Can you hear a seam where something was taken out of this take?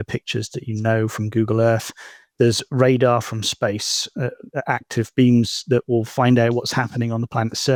no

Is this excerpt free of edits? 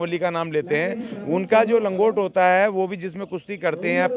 yes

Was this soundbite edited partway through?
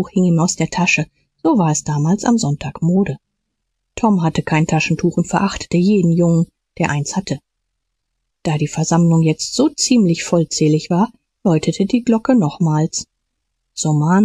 no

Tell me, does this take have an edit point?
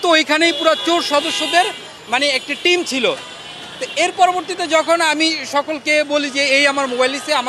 no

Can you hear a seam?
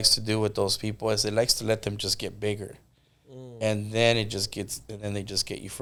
no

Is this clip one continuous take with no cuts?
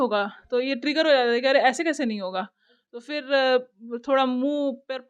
yes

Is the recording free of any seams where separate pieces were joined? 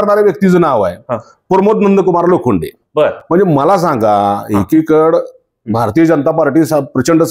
yes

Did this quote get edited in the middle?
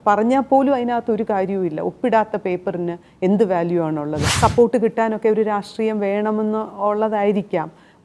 yes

